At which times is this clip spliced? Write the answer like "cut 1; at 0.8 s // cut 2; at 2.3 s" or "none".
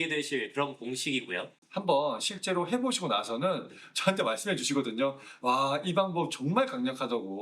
cut 1; at 1.6 s

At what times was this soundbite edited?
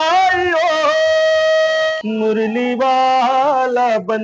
cut 1; at 2.0 s

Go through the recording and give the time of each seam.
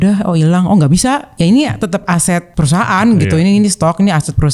cut 1; at 1.3 s // cut 2; at 2.5 s

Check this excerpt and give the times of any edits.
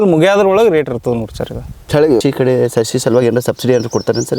cut 1; at 2.2 s

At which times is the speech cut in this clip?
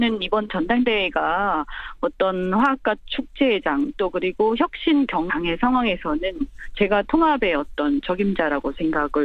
none

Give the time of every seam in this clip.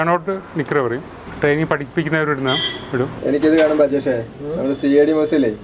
cut 1; at 3.2 s

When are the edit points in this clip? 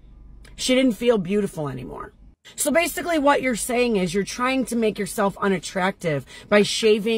none

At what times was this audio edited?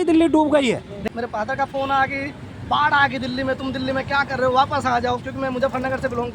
cut 1; at 0.9 s

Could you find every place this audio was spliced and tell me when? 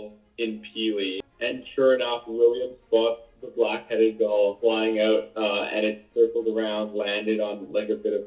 cut 1; at 1.3 s

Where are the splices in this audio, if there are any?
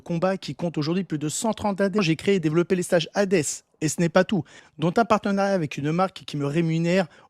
cut 1; at 2.0 s // cut 2; at 4.6 s

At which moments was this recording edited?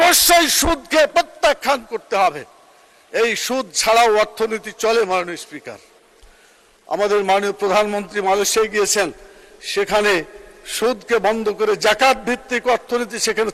none

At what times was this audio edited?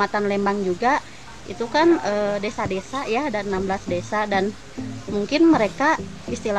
none

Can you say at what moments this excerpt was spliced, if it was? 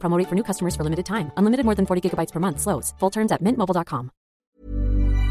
cut 1; at 4.4 s

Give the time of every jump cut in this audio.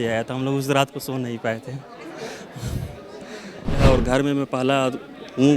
cut 1; at 3.8 s

